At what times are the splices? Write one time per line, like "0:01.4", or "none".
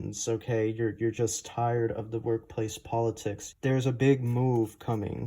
0:03.5

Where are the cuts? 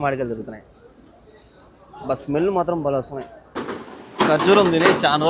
0:03.5

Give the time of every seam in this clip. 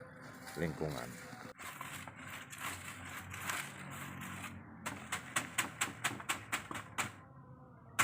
0:01.6

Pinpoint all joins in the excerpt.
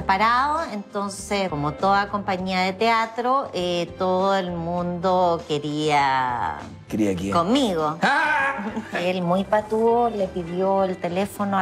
0:01.5
0:08.9

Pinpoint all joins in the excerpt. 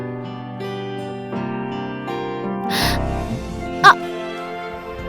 0:03.4

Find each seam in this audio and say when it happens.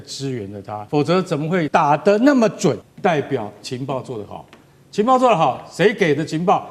0:00.8
0:01.7
0:02.9

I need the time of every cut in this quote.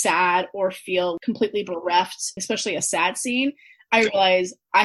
0:01.2
0:02.4

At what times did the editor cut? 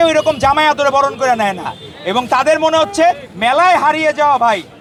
none

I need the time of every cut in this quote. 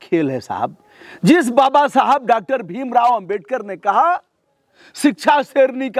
none

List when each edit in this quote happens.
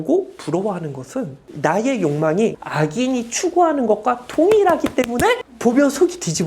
0:01.4
0:02.6
0:05.5

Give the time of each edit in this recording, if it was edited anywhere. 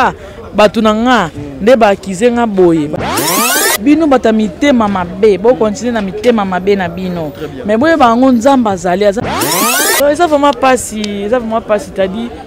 0:03.3
0:09.5

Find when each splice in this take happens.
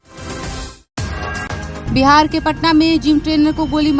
none

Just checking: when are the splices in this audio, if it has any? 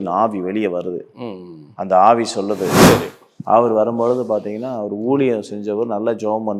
0:02.8

